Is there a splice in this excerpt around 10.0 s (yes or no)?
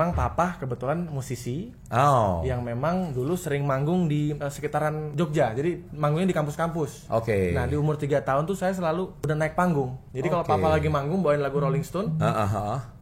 yes